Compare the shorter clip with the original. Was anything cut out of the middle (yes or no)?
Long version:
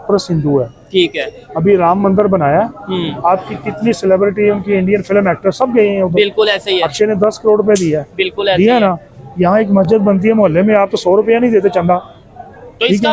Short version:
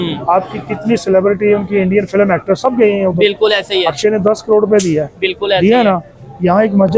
no